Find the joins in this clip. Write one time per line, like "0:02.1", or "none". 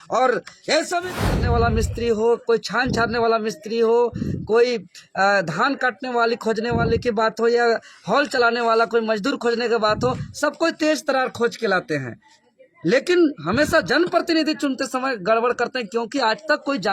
0:01.3